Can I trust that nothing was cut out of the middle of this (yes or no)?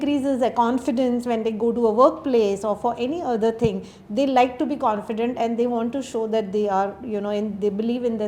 yes